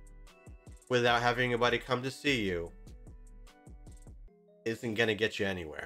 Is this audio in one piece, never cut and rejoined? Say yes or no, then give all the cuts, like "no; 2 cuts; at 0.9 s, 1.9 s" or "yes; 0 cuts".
yes; 0 cuts